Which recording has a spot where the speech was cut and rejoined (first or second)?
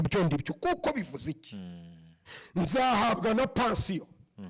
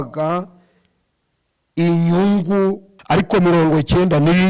second